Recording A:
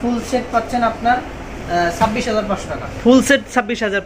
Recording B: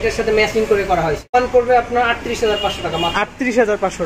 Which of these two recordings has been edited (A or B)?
B